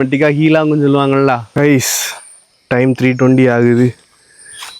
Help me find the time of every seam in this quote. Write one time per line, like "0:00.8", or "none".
0:01.5